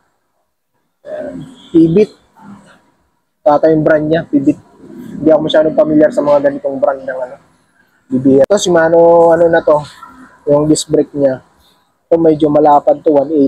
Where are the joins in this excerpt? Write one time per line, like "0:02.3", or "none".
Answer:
0:08.5